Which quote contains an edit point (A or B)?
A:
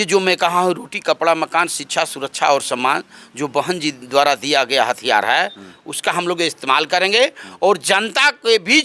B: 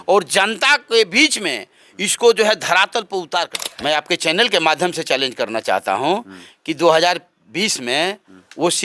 B